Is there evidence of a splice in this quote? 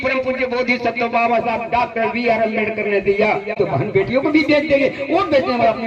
yes; 1 cut; at 3.5 s

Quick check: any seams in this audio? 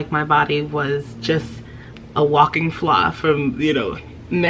no; 0 cuts

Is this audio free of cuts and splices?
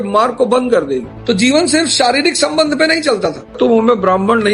no; 2 cuts; at 1.1 s, 3.5 s

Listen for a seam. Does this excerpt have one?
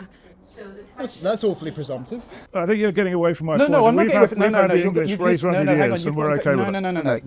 yes; 1 cut; at 2.4 s

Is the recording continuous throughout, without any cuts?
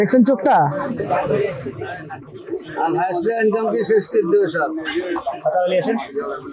yes; 0 cuts

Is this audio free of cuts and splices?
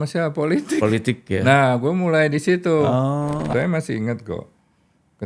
no; 1 cut; at 3.5 s

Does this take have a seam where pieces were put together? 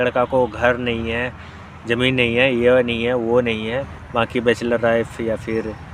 yes; 1 cut; at 4.0 s

